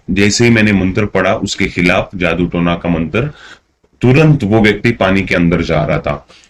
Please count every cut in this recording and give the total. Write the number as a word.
zero